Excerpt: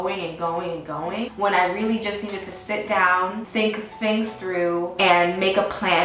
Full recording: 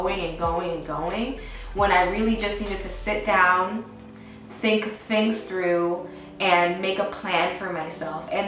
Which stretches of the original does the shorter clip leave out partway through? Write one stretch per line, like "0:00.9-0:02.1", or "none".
0:01.3-0:01.7
0:03.8-0:04.5
0:06.0-0:06.3

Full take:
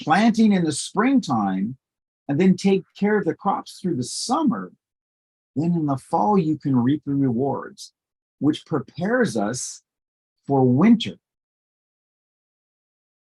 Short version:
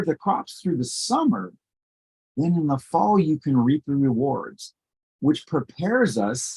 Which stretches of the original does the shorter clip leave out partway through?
none

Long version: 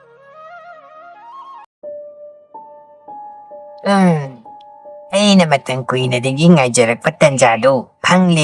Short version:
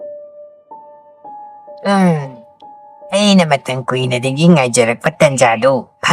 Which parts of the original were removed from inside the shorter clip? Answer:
0:03.7-0:03.8

